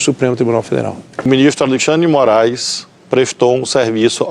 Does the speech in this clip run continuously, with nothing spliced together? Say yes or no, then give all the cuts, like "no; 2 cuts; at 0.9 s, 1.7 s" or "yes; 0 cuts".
no; 1 cut; at 1.3 s